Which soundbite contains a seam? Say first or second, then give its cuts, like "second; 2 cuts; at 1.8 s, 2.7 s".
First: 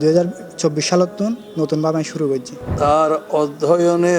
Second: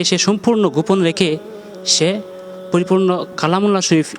first; 1 cut; at 2.7 s